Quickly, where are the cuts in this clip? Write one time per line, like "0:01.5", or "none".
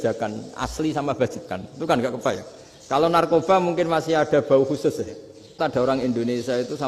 0:05.6